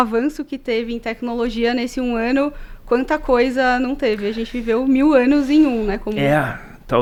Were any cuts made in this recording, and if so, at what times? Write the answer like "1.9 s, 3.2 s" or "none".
none